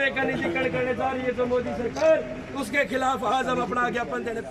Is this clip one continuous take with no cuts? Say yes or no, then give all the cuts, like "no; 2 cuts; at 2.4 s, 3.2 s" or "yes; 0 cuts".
yes; 0 cuts